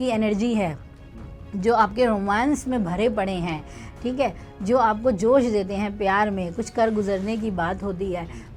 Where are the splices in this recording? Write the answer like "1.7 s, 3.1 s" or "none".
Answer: none